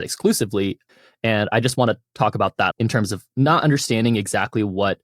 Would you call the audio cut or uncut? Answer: cut